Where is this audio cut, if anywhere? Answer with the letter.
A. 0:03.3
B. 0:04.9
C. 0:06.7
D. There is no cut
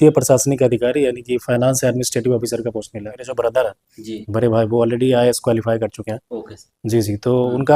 A